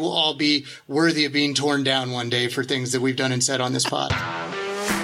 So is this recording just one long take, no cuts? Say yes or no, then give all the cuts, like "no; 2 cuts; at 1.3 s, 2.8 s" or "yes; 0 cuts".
no; 1 cut; at 4.1 s